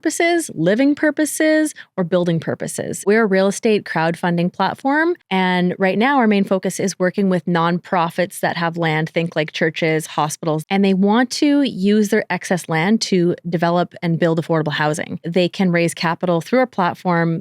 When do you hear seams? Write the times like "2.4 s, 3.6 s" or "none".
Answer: 3.0 s, 5.2 s, 10.6 s, 15.3 s